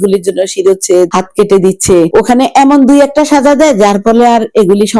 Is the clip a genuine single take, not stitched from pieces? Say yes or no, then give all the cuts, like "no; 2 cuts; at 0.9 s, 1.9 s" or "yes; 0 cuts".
yes; 0 cuts